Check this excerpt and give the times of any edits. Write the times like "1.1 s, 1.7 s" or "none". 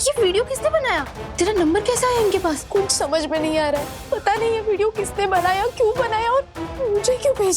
1.2 s, 2.6 s, 3.9 s